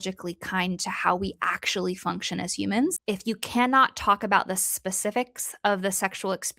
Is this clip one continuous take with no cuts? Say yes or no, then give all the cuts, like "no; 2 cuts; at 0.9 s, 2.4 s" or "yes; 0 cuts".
no; 1 cut; at 2.9 s